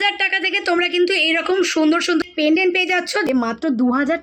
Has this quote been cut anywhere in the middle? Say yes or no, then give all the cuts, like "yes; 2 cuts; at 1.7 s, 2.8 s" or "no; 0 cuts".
yes; 2 cuts; at 2.2 s, 3.3 s